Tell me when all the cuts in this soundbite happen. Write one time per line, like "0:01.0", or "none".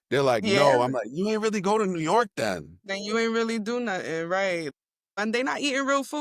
0:05.2

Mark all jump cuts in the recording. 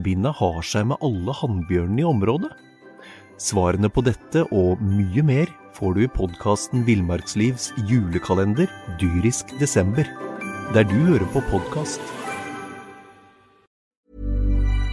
0:13.9

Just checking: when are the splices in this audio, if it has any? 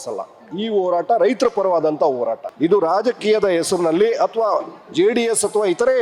0:02.4

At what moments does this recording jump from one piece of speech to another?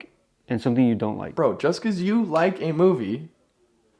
0:01.2

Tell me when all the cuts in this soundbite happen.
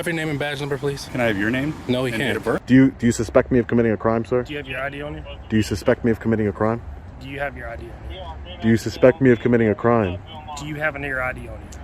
0:02.6

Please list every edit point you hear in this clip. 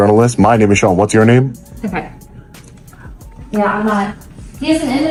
none

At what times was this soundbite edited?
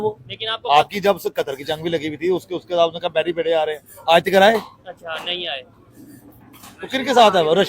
none

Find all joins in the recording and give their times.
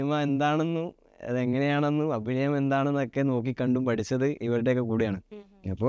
none

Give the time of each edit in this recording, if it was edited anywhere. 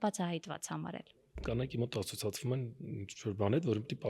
0:01.3

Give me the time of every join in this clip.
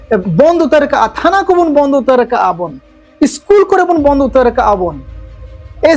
none

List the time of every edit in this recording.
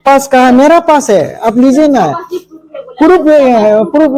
none

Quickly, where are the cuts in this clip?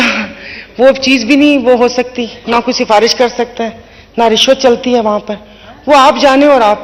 none

